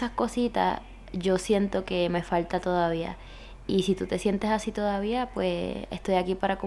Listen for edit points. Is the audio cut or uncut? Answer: uncut